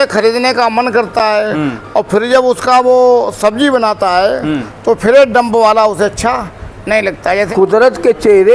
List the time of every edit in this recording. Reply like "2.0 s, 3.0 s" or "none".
7.5 s